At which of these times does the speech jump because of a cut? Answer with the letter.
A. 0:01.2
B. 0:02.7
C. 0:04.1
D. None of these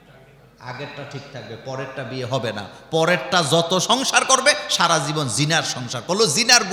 D